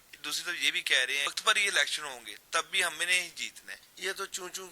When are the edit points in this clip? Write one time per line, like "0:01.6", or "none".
0:01.3
0:03.8